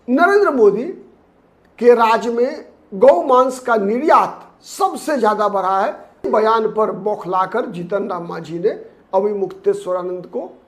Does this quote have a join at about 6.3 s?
yes; 1 cut; at 6.3 s

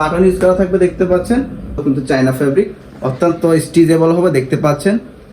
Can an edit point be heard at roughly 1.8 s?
yes; 1 cut; at 1.8 s

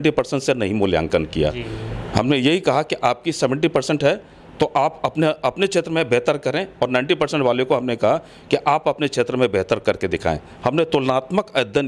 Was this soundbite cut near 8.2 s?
no; 0 cuts

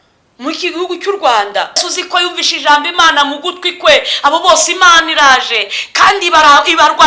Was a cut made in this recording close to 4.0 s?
no; 1 cut; at 1.9 s

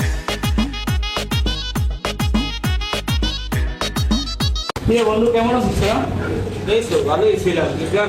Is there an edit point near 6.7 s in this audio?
no; 0 cuts

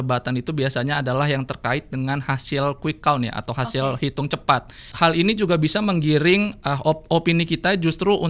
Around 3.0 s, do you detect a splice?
no; 1 cut; at 4.8 s

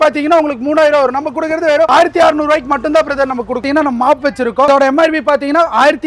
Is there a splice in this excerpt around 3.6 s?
yes; 3 cuts; at 1.9 s, 3.6 s, 4.7 s

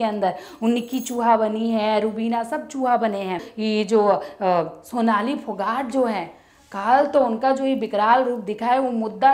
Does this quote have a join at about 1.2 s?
no; 1 cut; at 3.5 s

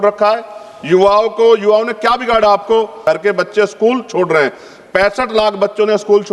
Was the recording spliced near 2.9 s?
yes; 1 cut; at 2.9 s

